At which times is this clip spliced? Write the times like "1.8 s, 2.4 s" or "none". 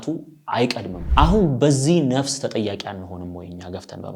0.9 s